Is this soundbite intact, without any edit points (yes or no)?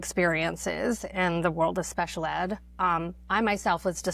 yes